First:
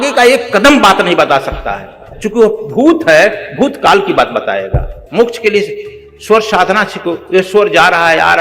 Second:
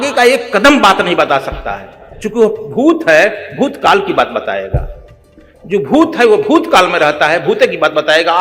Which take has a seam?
first; 1 cut; at 5.0 s

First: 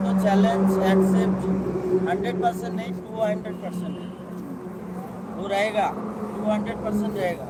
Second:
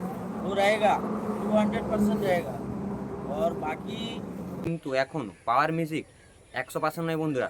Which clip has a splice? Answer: second; 1 cut; at 4.7 s

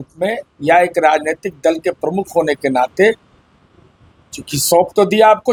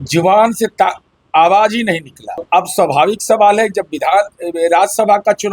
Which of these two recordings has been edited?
second; 1 cut; at 2.4 s

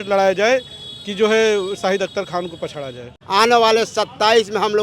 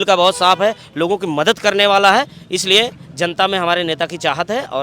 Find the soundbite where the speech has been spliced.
first; 1 cut; at 3.2 s

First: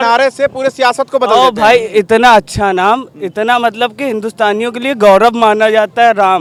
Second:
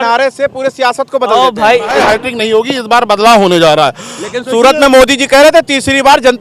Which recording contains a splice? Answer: second; 1 cut; at 2.0 s

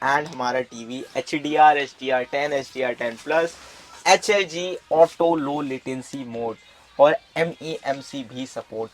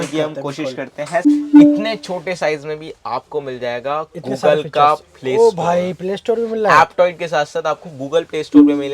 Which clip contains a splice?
second; 1 cut; at 1.3 s

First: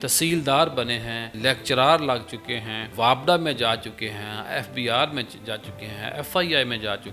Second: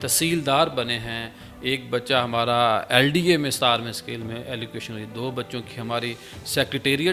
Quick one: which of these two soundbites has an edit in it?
first; 2 cuts; at 1.3 s, 2.9 s

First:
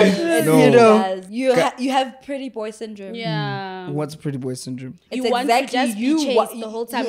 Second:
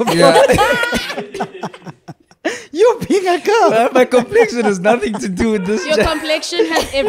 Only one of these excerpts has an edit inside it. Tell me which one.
first; 1 cut; at 1.2 s

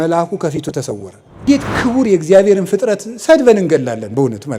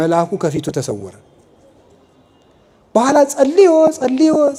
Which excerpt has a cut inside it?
first; 1 cut; at 1.5 s

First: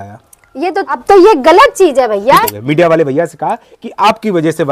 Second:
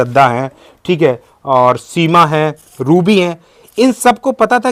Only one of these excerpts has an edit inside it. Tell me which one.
first; 2 cuts; at 1.0 s, 2.4 s

